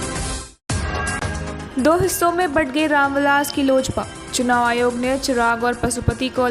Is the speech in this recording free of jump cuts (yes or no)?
no